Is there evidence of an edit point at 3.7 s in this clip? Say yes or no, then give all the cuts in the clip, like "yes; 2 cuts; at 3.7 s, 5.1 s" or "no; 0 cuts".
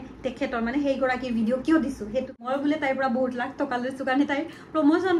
no; 1 cut; at 2.4 s